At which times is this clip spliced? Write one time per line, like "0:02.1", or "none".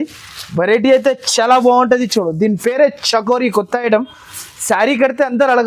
none